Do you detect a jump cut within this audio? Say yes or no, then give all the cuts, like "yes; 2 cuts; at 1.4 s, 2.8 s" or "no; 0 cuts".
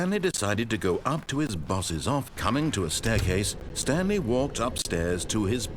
yes; 1 cut; at 2.3 s